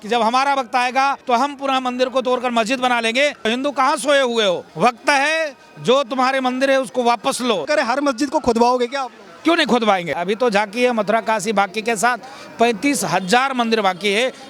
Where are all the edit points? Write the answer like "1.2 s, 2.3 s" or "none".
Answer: 1.2 s, 3.5 s, 7.7 s, 10.1 s

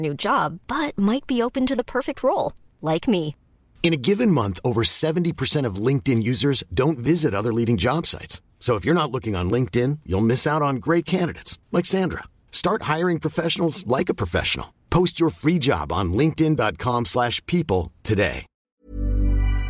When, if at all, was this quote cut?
18.5 s

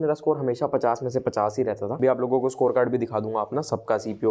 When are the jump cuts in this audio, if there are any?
1.9 s

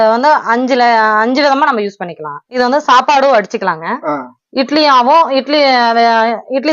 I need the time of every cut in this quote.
2.6 s

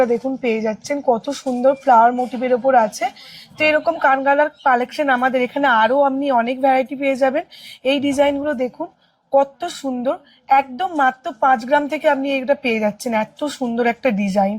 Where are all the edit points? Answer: none

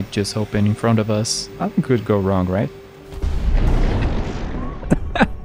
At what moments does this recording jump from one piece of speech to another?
1.4 s

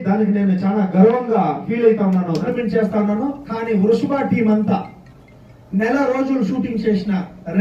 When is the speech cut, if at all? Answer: 2.5 s

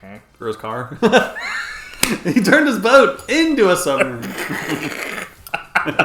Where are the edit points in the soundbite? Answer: none

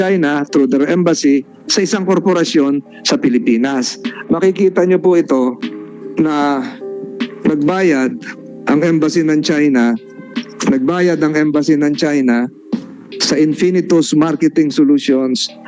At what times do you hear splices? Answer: 4.1 s

